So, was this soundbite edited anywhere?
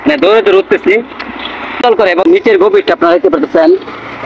yes; 1 cut; at 1.8 s

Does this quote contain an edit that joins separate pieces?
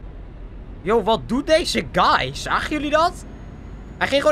no; 0 cuts

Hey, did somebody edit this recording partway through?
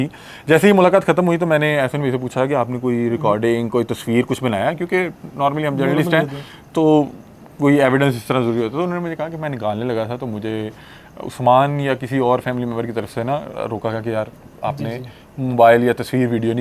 no; 0 cuts

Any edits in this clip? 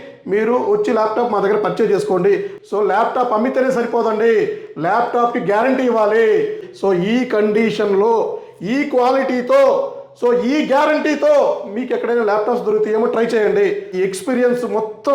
yes; 3 cuts; at 2.5 s, 6.7 s, 13.9 s

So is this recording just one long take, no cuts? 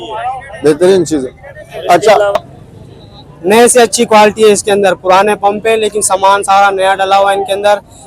no; 1 cut; at 2.6 s

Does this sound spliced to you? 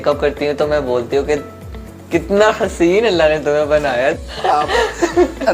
yes; 1 cut; at 4.2 s

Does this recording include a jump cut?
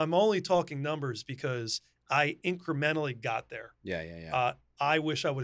no; 0 cuts

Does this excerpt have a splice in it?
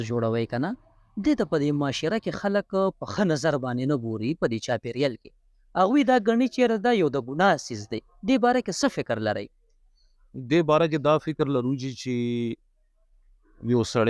no; 0 cuts

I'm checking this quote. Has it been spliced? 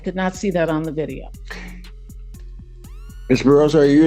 no; 0 cuts

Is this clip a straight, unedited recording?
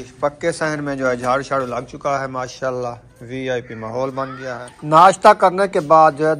no; 1 cut; at 4.7 s

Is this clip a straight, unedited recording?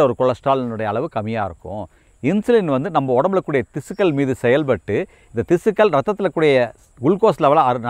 no; 1 cut; at 2.0 s

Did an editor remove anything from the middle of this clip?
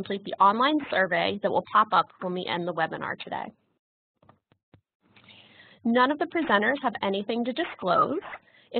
yes; 1 cut; at 4.6 s

